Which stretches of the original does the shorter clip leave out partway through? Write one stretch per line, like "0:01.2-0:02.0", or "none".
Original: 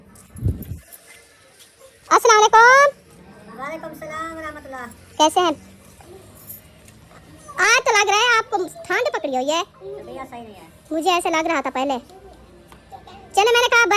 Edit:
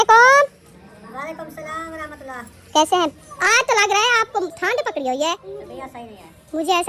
0:05.7-0:07.4
0:08.7-0:08.8
0:09.8-0:09.9